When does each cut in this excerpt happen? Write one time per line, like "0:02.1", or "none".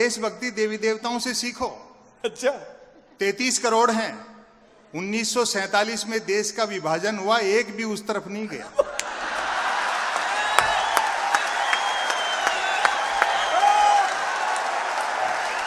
none